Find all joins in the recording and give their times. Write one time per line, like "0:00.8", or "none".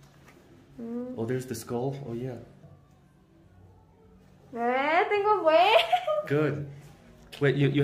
0:02.6